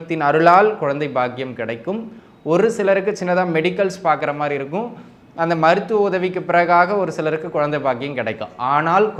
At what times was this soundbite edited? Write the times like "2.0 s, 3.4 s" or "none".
none